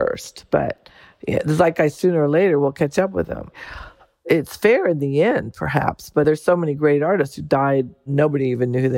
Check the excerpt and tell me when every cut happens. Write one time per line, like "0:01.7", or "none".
0:04.2
0:06.2
0:08.1

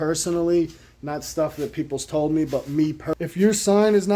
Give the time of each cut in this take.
0:03.1

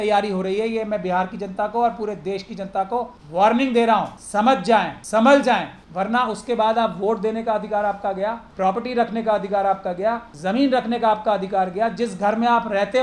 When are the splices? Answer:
0:03.2
0:04.7
0:05.8
0:08.4
0:10.3

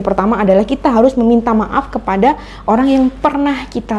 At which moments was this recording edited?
none

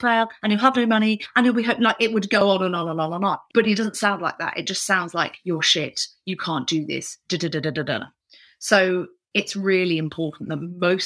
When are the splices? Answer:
0:09.2

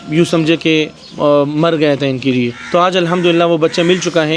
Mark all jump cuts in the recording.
0:01.0
0:02.6

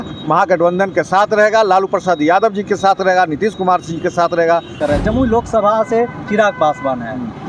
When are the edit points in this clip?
0:04.7

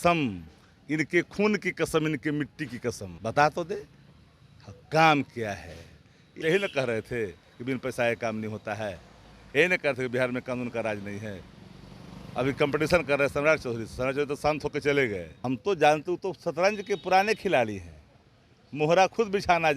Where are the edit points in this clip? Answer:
0:03.1
0:06.4
0:15.3

